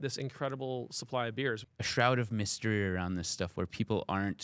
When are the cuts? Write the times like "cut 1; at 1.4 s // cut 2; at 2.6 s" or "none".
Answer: cut 1; at 1.6 s